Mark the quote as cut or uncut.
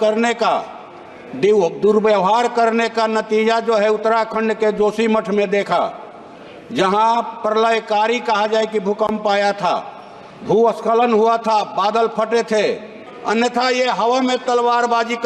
cut